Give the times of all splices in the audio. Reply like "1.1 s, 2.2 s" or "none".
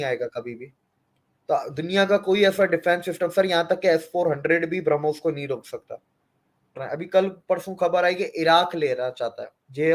6.8 s